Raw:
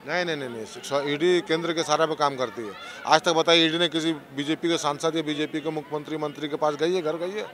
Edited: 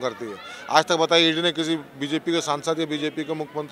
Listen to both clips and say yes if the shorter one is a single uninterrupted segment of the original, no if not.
yes